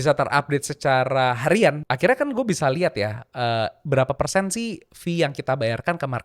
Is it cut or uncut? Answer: cut